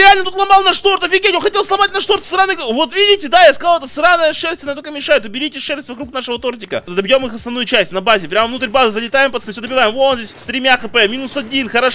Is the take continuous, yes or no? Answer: no